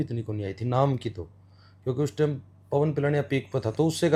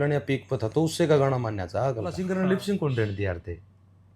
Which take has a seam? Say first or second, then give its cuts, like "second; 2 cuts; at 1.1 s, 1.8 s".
second; 1 cut; at 2.2 s